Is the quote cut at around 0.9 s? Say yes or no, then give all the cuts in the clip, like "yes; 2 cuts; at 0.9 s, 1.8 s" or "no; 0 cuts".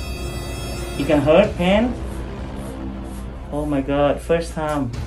yes; 1 cut; at 0.9 s